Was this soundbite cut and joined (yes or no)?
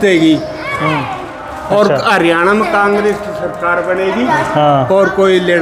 no